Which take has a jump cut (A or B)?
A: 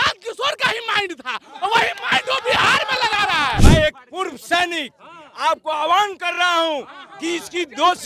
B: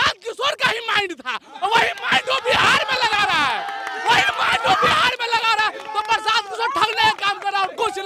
A